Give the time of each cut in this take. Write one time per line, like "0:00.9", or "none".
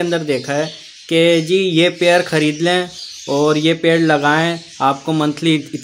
none